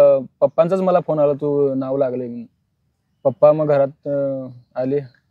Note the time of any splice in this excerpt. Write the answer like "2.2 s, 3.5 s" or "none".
none